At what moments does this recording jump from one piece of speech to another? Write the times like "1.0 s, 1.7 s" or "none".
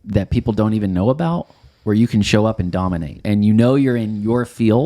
3.1 s

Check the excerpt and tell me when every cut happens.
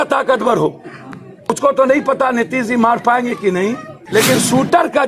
1.5 s, 3.9 s

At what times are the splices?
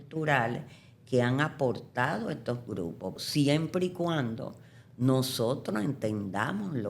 3.2 s

